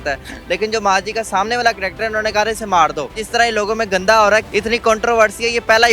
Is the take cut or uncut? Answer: cut